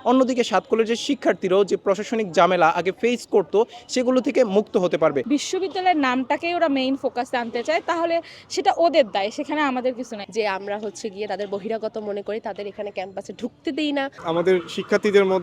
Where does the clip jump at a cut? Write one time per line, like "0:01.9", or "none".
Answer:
0:05.2
0:10.2
0:14.1